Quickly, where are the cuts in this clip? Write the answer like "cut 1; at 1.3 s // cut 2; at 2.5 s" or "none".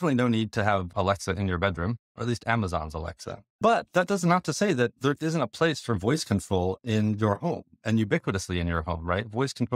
cut 1; at 0.9 s // cut 2; at 2.1 s // cut 3; at 3.6 s